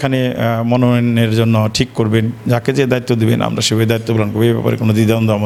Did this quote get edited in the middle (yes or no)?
no